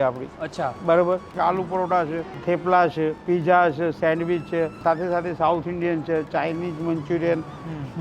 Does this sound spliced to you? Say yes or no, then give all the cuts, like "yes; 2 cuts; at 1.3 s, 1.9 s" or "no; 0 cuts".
yes; 4 cuts; at 1.3 s, 2.3 s, 3.2 s, 4.7 s